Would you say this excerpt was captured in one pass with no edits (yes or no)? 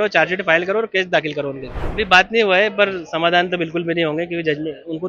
no